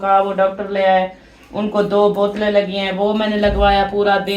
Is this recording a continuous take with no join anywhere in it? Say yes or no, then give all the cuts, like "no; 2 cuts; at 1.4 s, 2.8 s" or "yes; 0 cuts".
yes; 0 cuts